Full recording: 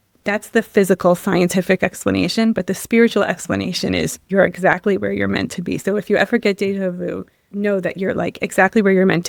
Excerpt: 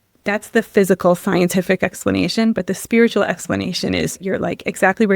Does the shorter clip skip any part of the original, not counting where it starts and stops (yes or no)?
yes